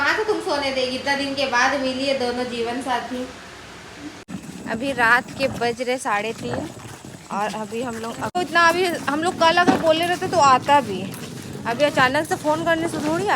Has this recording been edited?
yes; 2 cuts; at 4.2 s, 8.4 s

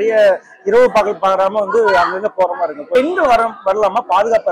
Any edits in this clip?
yes; 1 cut; at 2.9 s

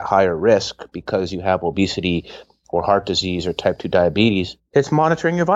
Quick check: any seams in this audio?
yes; 1 cut; at 4.6 s

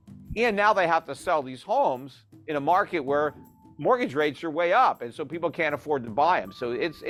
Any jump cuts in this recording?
no; 0 cuts

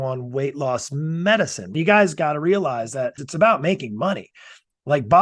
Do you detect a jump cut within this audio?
yes; 2 cuts; at 1.7 s, 3.2 s

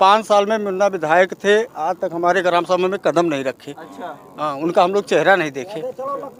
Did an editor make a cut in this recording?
no; 0 cuts

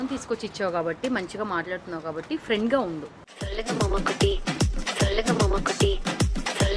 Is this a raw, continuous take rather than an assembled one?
no; 1 cut; at 3.4 s

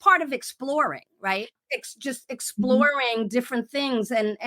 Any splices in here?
yes; 1 cut; at 1.5 s

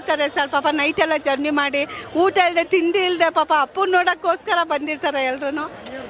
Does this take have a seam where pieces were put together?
no; 0 cuts

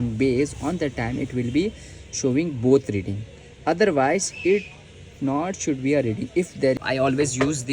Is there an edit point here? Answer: yes; 1 cut; at 6.8 s

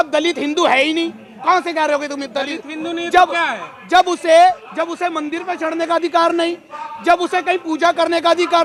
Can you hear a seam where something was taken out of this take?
no; 0 cuts

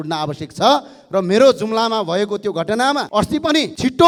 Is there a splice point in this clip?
no; 0 cuts

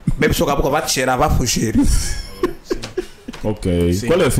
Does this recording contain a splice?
yes; 1 cut; at 3.2 s

